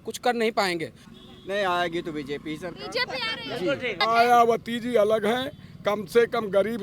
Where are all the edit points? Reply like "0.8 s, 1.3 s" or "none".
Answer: 1.0 s, 4.0 s